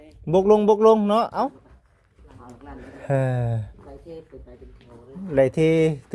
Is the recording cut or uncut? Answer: cut